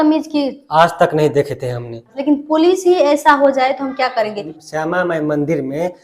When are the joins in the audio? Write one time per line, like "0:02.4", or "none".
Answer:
0:02.1
0:04.7